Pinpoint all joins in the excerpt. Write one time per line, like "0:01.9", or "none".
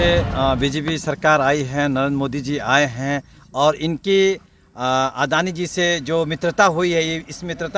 none